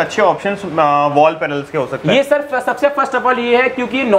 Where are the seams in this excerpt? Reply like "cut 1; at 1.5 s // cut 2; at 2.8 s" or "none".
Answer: none